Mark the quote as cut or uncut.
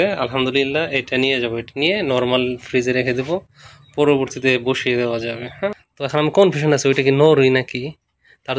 cut